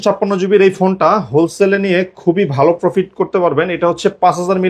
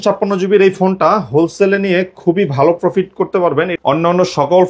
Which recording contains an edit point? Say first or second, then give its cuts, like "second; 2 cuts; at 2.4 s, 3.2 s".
second; 1 cut; at 3.7 s